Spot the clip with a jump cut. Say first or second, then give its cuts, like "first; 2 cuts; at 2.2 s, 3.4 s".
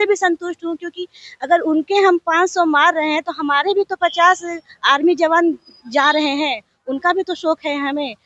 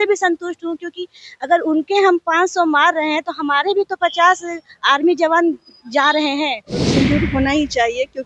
second; 1 cut; at 6.7 s